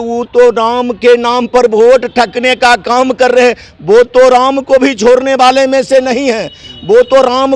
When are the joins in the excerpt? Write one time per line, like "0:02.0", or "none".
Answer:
none